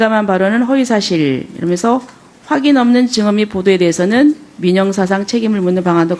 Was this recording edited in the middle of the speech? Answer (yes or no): yes